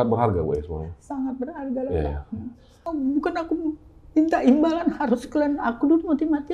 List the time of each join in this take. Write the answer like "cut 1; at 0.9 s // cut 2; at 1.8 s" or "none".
cut 1; at 2.9 s